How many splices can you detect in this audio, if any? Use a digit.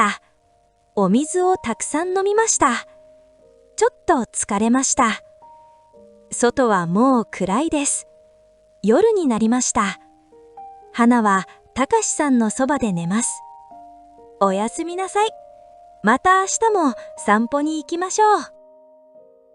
1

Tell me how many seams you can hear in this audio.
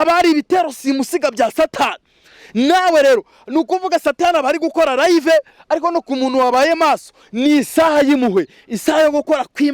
0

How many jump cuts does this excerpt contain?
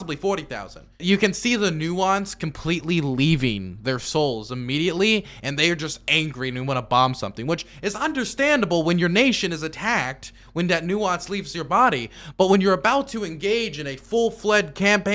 1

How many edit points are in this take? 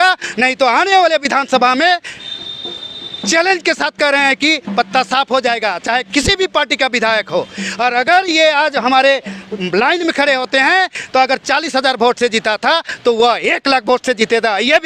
0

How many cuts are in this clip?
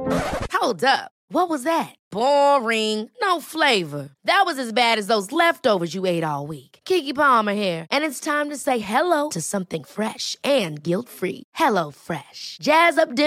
0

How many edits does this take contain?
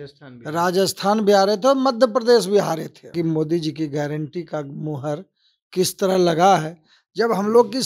1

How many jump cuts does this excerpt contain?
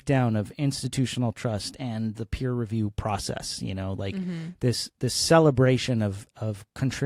0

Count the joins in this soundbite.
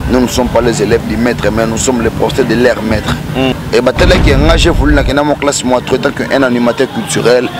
1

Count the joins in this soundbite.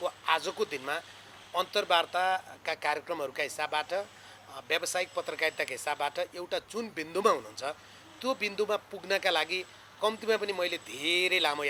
0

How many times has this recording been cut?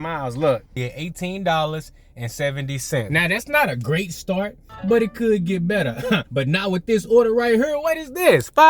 3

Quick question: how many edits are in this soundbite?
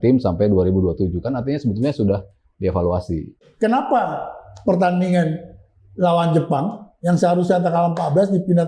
1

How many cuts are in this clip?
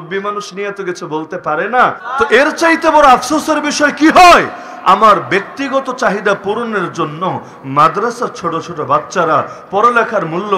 1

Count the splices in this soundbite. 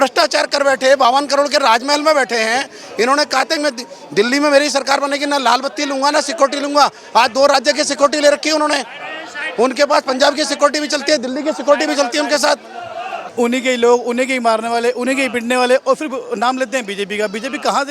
1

